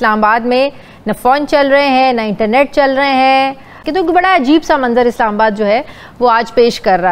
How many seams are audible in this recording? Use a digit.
1